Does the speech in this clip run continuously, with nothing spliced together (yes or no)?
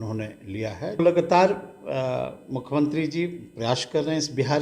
no